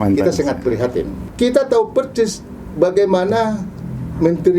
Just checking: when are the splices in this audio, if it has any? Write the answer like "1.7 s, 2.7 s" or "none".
1.2 s